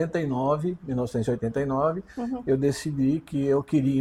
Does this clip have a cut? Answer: no; 0 cuts

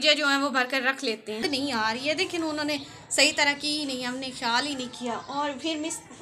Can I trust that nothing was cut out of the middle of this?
no; 1 cut; at 1.4 s

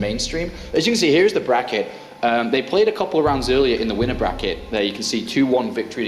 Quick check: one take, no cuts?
no; 1 cut; at 1.9 s

